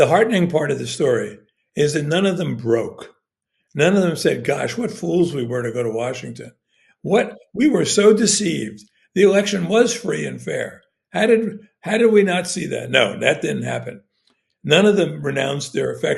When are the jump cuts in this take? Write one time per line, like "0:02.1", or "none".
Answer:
none